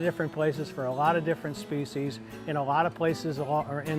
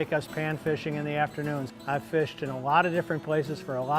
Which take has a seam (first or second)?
second